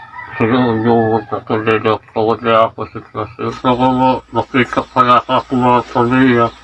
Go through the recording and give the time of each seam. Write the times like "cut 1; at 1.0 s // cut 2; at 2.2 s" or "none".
cut 1; at 3.3 s